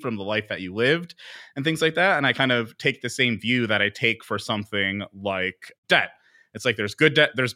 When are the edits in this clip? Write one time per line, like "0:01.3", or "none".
none